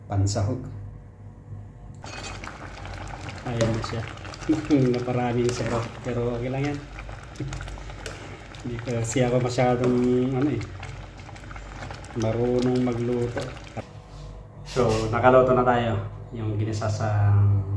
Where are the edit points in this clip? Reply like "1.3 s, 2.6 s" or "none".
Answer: 2.0 s, 13.7 s